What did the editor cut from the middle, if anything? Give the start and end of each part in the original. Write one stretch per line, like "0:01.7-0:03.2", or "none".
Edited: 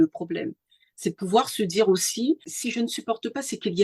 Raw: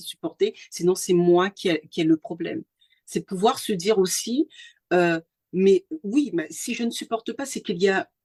0:04.7-0:06.6